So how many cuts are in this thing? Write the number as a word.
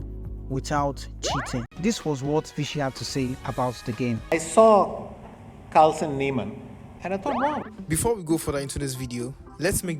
two